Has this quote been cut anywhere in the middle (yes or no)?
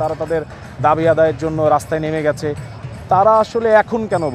no